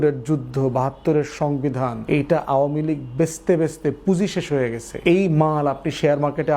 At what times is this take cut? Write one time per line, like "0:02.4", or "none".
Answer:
0:02.0
0:04.8